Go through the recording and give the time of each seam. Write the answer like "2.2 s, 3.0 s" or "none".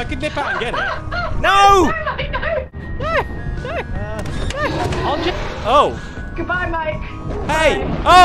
2.8 s